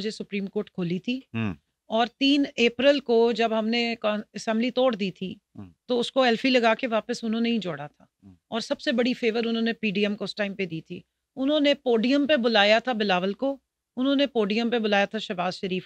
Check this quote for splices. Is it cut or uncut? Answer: uncut